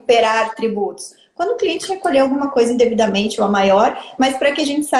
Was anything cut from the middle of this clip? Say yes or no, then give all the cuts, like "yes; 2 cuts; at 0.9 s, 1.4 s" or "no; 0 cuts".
no; 0 cuts